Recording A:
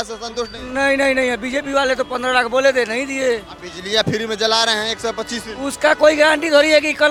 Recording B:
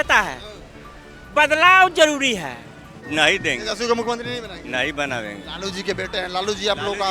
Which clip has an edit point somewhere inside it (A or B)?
B